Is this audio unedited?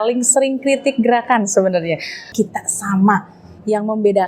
no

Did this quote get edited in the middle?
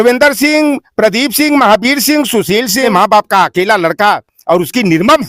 yes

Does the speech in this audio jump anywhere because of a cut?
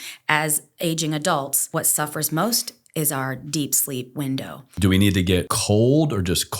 yes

